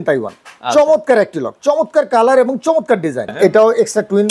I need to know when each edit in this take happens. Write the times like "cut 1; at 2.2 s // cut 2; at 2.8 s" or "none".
cut 1; at 3.3 s